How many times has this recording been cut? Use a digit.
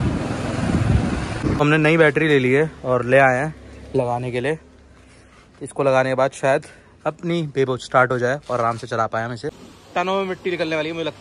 2